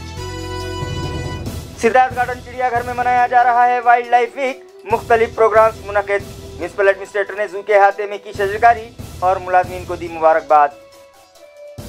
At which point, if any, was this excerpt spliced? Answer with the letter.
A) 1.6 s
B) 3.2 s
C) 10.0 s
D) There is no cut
D